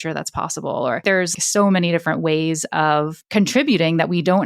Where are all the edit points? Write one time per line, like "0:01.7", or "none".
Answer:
0:01.3
0:03.2